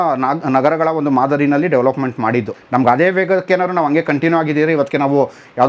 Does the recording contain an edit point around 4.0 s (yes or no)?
no